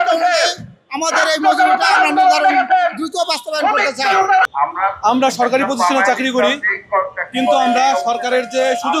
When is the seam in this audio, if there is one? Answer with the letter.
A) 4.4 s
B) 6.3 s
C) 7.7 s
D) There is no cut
A